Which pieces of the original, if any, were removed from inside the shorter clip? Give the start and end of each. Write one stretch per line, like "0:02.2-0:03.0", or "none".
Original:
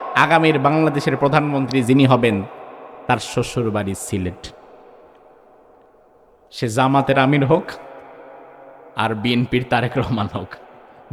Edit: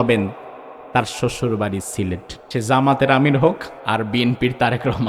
0:04.5-0:06.4
0:07.8-0:08.8